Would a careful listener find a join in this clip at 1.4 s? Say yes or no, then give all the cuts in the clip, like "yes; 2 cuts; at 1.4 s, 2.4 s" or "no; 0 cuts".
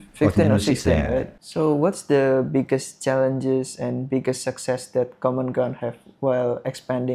yes; 1 cut; at 1.4 s